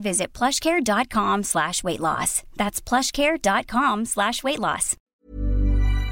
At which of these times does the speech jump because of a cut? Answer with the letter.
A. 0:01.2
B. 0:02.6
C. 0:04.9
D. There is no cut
C